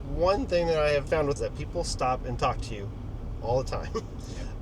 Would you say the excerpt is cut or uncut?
cut